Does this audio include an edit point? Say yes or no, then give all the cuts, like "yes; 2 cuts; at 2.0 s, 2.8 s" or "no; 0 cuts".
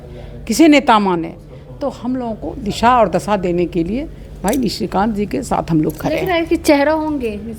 no; 0 cuts